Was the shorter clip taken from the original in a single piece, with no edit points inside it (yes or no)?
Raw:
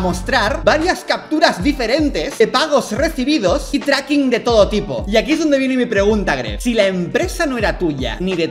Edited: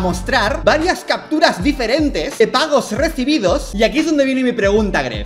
no